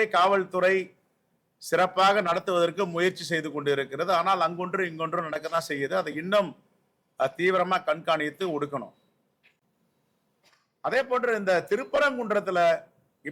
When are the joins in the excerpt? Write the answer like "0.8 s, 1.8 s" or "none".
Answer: none